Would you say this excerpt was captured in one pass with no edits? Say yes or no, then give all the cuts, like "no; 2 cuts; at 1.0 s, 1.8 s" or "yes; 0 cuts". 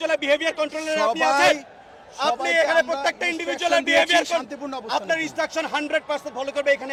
yes; 0 cuts